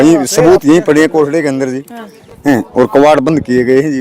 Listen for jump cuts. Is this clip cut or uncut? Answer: uncut